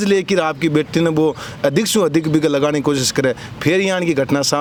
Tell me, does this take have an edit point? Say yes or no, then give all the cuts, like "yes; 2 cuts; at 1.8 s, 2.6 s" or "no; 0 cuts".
no; 0 cuts